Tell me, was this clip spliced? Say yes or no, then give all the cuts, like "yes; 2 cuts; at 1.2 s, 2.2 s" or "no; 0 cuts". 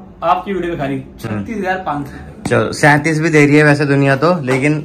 no; 0 cuts